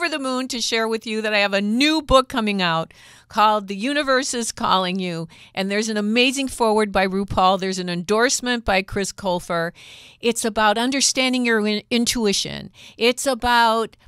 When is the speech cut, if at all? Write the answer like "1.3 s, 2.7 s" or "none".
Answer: none